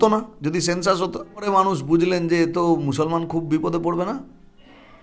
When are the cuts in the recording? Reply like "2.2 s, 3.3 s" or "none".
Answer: 1.5 s